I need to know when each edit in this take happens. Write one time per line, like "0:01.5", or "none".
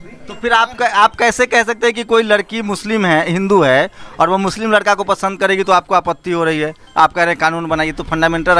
none